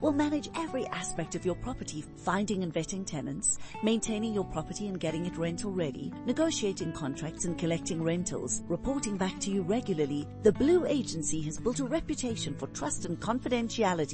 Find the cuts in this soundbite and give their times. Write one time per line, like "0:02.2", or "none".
none